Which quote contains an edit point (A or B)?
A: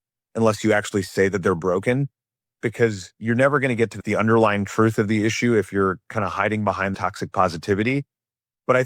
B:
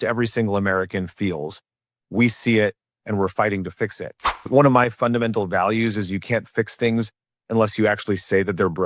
B